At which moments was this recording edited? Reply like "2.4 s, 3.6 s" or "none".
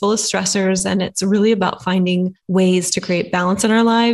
2.4 s